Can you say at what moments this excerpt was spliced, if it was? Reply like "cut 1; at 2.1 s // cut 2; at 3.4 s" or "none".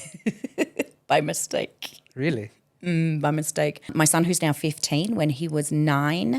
cut 1; at 3.9 s